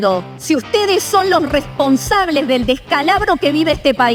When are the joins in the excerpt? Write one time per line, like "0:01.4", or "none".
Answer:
none